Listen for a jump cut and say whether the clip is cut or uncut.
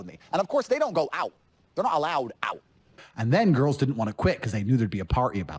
cut